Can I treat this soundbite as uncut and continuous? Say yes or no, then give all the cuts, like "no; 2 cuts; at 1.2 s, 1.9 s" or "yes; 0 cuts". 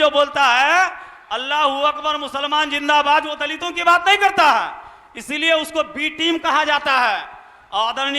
yes; 0 cuts